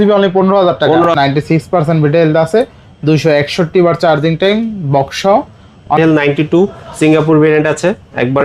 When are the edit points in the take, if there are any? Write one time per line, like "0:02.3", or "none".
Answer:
0:01.1
0:05.9